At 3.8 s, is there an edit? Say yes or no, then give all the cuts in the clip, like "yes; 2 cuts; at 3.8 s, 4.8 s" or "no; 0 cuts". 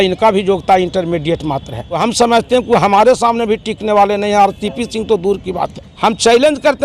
no; 2 cuts; at 1.8 s, 5.8 s